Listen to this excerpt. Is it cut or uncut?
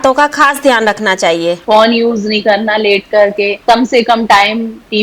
cut